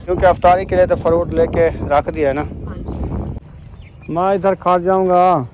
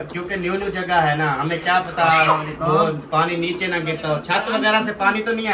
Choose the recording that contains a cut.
first; 1 cut; at 3.4 s

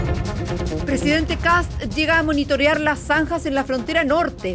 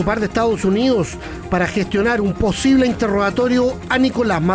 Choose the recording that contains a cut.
first; 1 cut; at 0.9 s

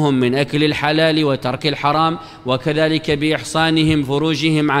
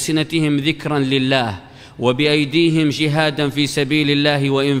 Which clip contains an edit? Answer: first; 2 cuts; at 1.0 s, 2.4 s

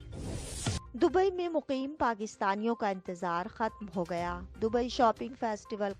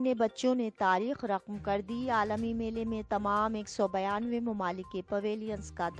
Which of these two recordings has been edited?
first; 1 cut; at 0.9 s

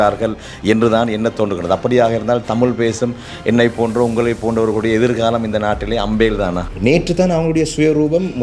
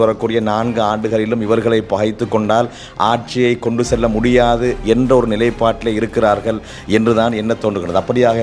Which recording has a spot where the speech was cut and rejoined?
first; 1 cut; at 6.6 s

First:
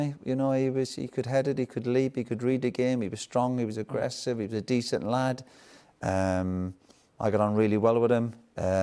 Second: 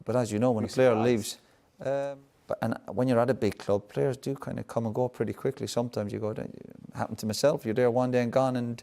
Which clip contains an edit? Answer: second; 1 cut; at 2.1 s

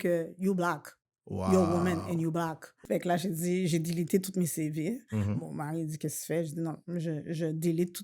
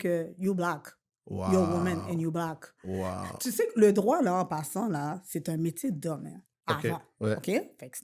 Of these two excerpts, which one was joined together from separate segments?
first; 1 cut; at 2.7 s

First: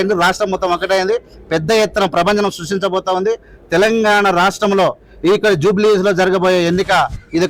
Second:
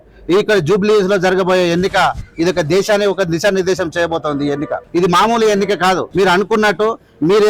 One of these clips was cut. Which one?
second; 2 cuts; at 4.8 s, 6.1 s

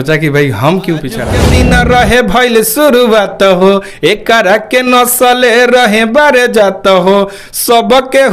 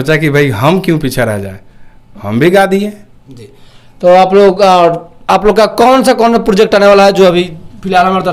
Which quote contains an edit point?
first; 1 cut; at 1.4 s

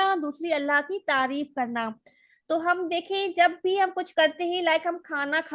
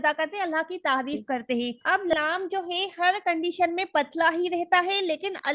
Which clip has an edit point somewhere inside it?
second; 1 cut; at 1.8 s

